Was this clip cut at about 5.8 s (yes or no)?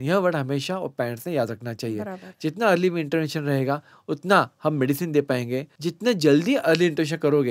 yes